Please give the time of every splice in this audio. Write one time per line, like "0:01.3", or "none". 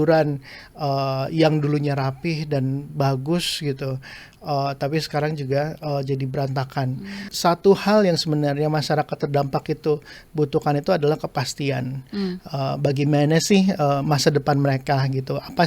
0:07.2